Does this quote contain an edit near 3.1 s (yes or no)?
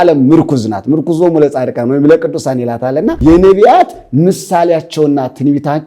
yes